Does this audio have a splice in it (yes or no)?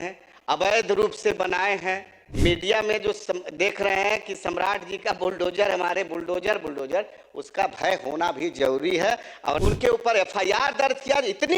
yes